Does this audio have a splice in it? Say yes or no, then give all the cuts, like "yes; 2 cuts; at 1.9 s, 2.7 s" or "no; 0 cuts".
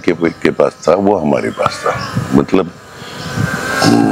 no; 0 cuts